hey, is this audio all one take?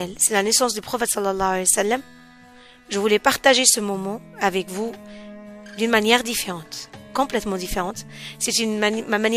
yes; 0 cuts

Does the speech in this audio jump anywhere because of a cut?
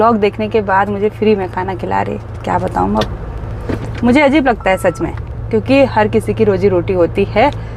no; 0 cuts

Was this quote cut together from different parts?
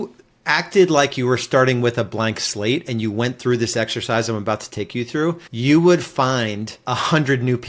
yes; 2 cuts; at 5.5 s, 6.7 s

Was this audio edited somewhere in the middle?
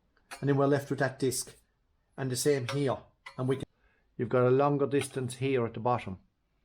yes; 1 cut; at 3.7 s

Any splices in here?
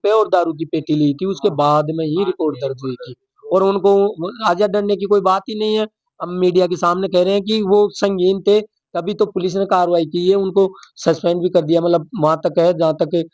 no; 0 cuts

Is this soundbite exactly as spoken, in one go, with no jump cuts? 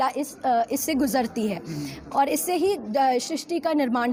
yes; 0 cuts

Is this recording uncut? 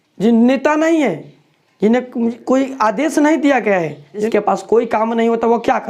no; 1 cut; at 4.3 s

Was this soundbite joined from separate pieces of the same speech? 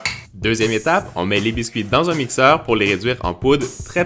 yes; 1 cut; at 2.9 s

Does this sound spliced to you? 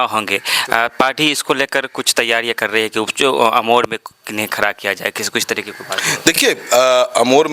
no; 0 cuts

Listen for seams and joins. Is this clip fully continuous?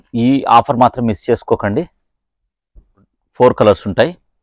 no; 1 cut; at 3.2 s

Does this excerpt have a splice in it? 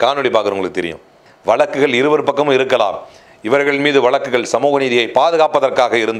yes; 1 cut; at 1.2 s

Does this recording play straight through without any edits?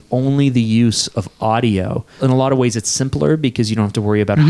no; 1 cut; at 2.2 s

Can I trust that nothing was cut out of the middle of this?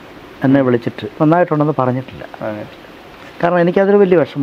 no; 1 cut; at 1.1 s

